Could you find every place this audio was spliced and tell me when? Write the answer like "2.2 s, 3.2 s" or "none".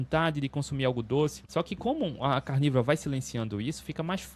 1.4 s